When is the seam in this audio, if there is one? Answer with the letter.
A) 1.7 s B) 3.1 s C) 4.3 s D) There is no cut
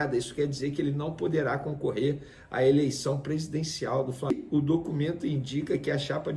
C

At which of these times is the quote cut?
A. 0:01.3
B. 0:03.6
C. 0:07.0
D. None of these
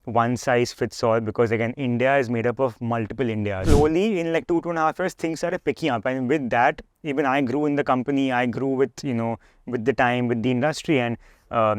B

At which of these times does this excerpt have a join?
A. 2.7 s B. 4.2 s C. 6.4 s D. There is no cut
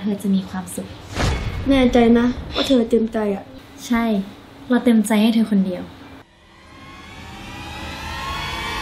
D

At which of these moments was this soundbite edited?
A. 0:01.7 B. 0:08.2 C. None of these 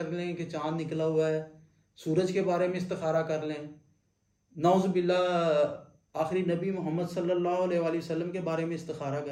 C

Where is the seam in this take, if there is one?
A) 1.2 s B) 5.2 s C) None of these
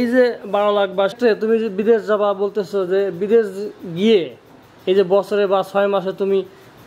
A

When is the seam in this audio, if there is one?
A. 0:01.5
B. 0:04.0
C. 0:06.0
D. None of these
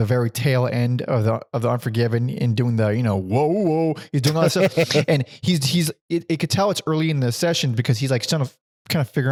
D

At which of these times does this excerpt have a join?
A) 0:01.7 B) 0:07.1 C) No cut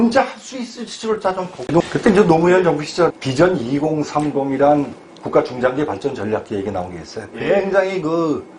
A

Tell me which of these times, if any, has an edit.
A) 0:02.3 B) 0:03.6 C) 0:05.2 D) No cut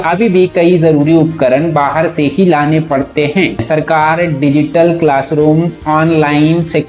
B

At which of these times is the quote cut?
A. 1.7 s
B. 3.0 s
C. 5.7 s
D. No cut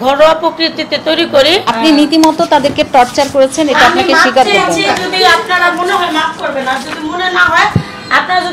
A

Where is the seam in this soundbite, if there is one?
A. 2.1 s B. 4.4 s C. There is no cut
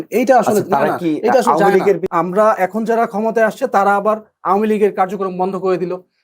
A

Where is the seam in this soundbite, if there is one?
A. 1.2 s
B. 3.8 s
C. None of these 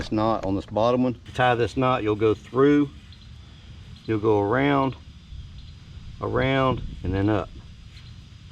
A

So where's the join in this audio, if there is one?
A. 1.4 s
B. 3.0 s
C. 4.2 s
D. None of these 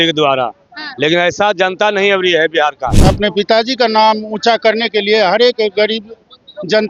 B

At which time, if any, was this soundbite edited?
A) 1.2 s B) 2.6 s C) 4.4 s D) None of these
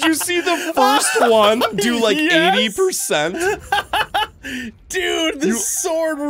D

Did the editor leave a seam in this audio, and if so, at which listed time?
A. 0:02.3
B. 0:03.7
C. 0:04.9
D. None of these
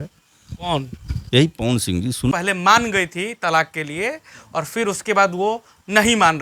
A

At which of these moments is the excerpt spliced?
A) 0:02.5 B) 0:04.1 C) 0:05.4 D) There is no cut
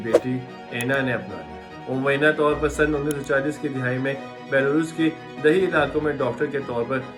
D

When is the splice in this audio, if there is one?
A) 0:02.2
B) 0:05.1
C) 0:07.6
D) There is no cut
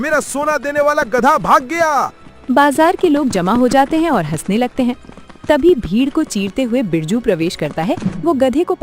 A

